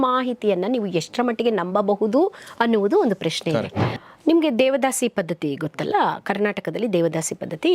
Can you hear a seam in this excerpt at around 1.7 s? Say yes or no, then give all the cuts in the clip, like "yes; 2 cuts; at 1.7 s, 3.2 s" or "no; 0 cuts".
no; 1 cut; at 3.6 s